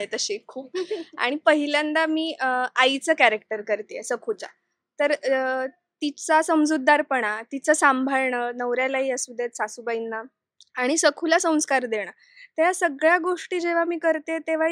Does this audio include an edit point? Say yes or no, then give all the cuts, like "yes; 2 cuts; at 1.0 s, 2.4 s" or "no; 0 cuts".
no; 0 cuts